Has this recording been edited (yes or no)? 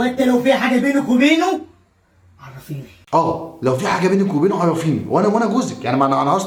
no